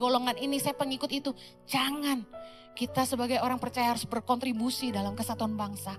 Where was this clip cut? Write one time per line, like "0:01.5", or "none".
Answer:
none